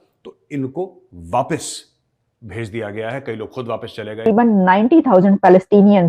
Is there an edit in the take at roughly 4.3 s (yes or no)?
yes